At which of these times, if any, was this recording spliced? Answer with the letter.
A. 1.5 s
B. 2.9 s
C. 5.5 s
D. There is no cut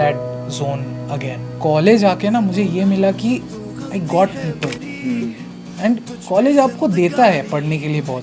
A